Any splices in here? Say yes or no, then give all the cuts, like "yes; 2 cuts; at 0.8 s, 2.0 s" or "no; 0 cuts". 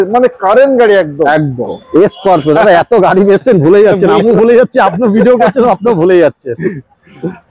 yes; 1 cut; at 1.8 s